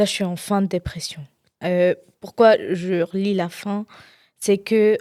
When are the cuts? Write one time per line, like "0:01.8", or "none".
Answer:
none